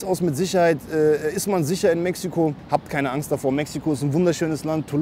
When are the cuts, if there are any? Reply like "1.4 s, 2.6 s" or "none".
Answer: 2.6 s